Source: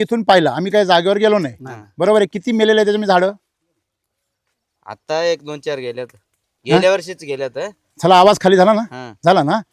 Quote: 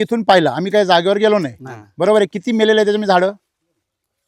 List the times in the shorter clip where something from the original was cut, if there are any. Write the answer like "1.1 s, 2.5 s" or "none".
none